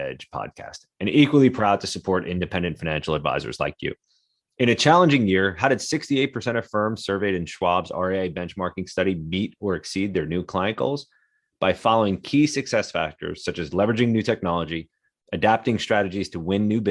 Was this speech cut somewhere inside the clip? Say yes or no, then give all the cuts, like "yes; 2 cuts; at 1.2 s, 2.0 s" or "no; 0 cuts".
no; 0 cuts